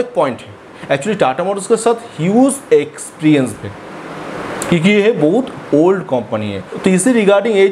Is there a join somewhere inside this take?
no; 0 cuts

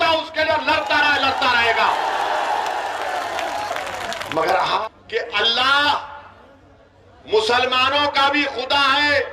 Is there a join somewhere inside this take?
yes; 1 cut; at 4.8 s

